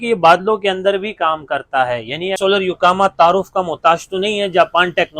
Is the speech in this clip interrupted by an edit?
yes; 1 cut; at 2.3 s

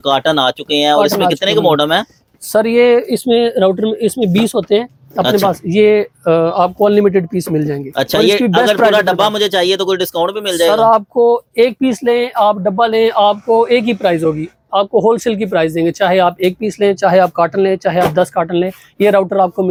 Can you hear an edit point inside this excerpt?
no; 0 cuts

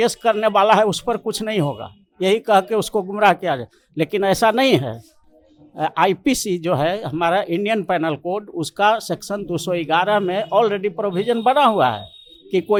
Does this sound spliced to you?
no; 0 cuts

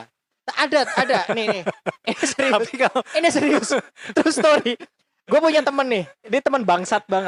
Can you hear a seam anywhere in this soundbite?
no; 0 cuts

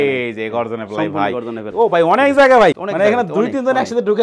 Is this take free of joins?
no; 2 cuts; at 1.6 s, 2.8 s

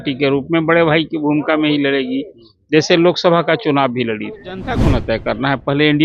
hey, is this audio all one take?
no; 1 cut; at 4.8 s

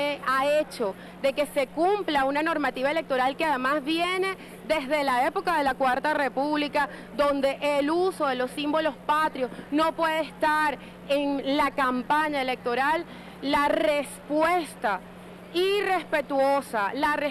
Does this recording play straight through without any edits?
no; 1 cut; at 2.8 s

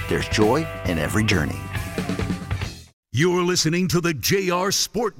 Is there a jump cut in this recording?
yes; 1 cut; at 2.8 s

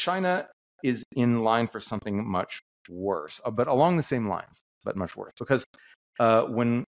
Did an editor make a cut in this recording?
no; 0 cuts

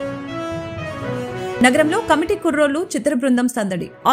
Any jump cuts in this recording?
no; 0 cuts

